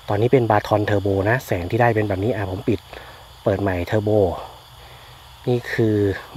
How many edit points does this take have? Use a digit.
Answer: 0